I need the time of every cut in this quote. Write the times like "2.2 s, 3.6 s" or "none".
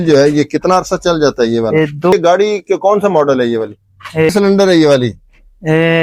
2.1 s, 4.3 s